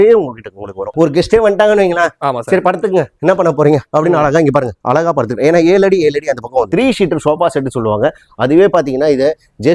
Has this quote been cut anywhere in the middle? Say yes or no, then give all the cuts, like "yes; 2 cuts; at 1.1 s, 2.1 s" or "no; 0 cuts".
yes; 2 cuts; at 0.9 s, 6.7 s